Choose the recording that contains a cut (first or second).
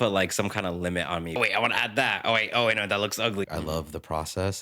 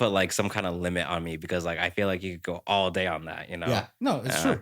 first